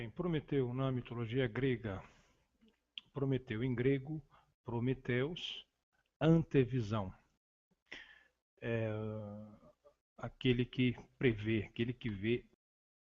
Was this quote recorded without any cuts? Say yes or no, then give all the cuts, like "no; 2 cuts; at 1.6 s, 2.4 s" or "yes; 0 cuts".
no; 1 cut; at 1.4 s